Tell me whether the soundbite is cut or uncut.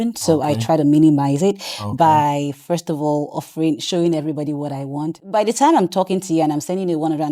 cut